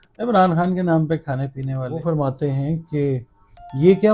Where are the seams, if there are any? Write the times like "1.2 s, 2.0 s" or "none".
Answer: 2.0 s